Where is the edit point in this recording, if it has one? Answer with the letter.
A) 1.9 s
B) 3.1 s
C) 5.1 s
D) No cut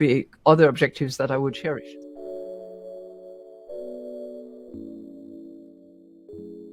A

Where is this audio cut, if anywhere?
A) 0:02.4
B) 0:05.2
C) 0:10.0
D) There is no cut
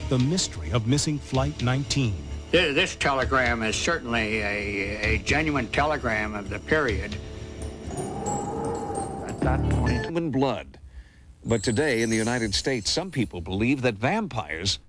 D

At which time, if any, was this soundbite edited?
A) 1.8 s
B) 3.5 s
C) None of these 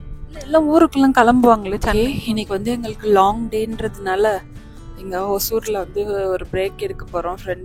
A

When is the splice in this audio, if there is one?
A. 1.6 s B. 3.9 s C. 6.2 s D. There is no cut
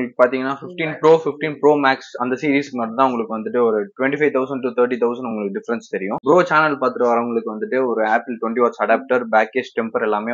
C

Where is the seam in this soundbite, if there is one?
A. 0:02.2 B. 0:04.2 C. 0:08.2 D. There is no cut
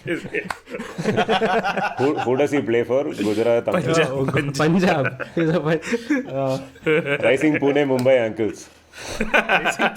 D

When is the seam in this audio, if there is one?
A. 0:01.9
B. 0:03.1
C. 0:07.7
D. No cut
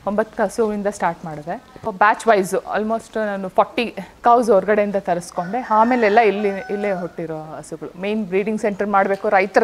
A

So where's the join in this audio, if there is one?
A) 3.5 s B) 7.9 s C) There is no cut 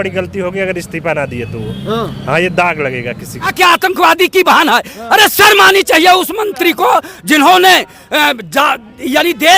A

